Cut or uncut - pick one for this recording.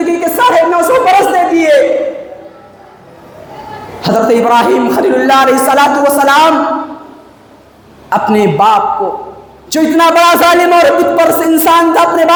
uncut